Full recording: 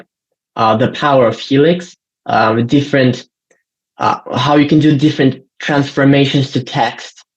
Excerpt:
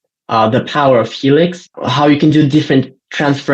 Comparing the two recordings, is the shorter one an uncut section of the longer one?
no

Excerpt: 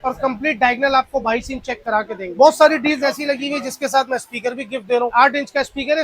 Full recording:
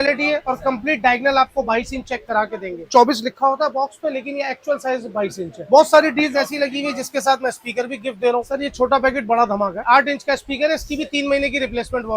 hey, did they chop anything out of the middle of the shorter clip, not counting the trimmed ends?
yes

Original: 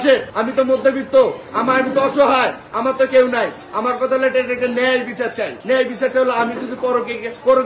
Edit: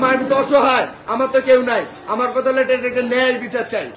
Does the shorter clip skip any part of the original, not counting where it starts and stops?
no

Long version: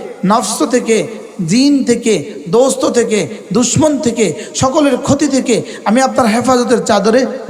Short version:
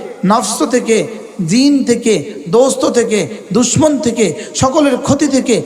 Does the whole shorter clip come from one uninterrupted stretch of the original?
yes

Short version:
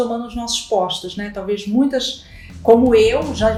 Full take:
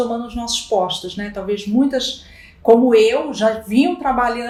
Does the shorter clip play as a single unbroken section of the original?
yes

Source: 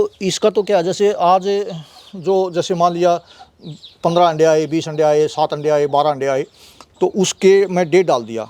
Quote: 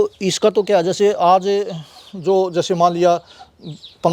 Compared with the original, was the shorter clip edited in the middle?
no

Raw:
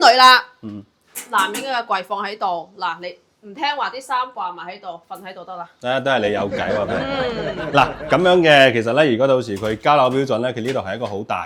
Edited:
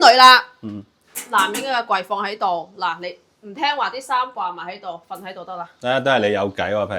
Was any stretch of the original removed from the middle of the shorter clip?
no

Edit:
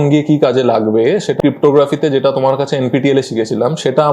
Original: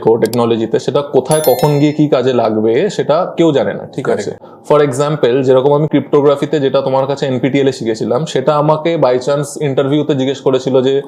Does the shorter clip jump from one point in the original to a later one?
yes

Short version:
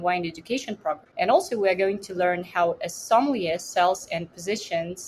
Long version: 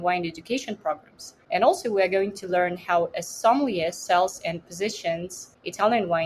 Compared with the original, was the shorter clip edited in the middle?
yes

